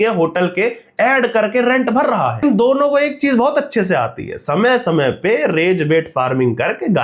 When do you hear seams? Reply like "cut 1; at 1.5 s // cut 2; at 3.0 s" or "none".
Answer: cut 1; at 2.4 s

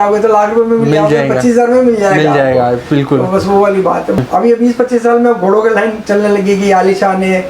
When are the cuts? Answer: cut 1; at 4.2 s

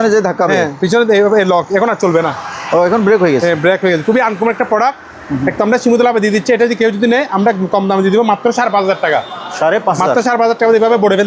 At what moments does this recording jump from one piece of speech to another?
none

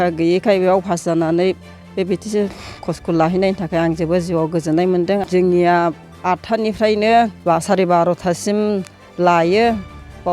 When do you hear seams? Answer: cut 1; at 5.2 s // cut 2; at 7.4 s

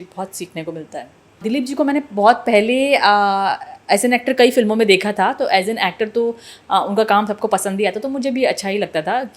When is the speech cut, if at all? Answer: cut 1; at 1.4 s

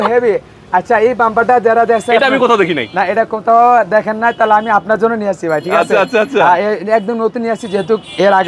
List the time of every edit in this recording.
none

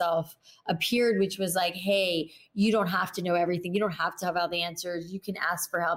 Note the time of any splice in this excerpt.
none

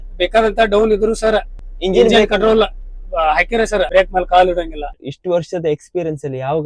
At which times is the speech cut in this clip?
cut 1; at 1.6 s // cut 2; at 3.9 s // cut 3; at 5.1 s

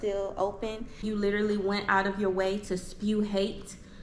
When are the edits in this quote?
cut 1; at 1.0 s

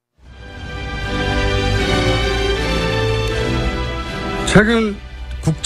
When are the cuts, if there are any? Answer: cut 1; at 4.1 s

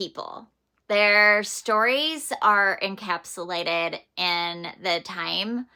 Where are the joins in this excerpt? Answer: none

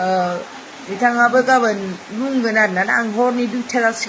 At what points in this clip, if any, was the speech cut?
none

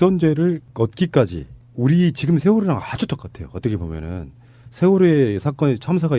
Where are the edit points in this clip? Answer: cut 1; at 1.3 s

